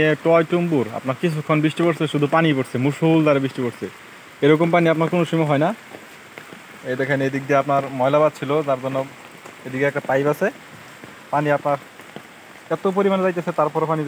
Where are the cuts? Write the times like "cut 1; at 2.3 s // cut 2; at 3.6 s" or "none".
none